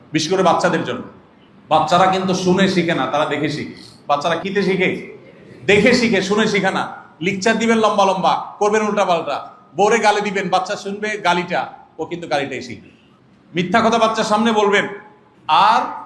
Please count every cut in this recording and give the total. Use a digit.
1